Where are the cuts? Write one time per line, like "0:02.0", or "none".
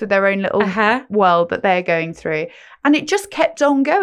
none